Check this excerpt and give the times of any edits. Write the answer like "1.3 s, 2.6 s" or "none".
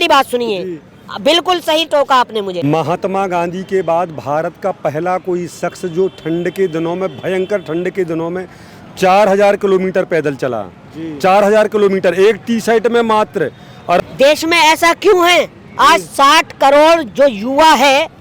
2.6 s, 14.0 s